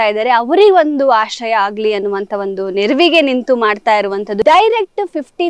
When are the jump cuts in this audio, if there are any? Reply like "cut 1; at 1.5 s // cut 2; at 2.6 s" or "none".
cut 1; at 4.4 s